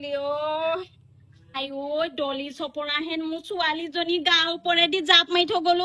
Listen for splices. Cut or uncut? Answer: uncut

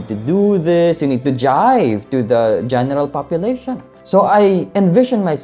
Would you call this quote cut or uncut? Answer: cut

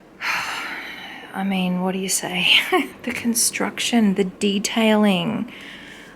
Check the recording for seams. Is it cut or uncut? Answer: cut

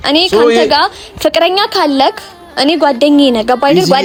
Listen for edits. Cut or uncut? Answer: uncut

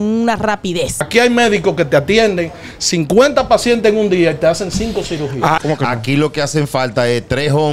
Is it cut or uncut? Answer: cut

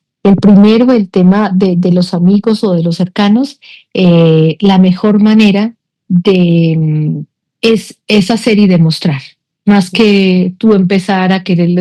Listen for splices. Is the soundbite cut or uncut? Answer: uncut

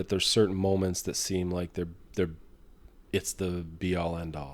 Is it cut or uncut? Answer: uncut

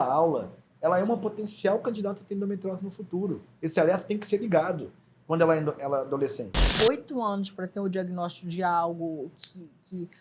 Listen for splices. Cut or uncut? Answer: cut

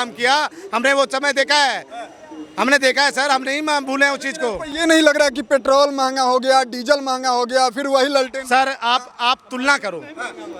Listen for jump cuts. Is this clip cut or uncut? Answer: uncut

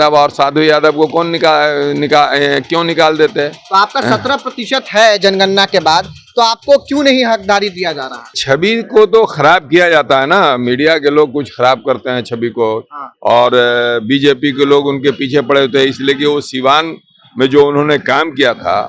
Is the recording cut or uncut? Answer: cut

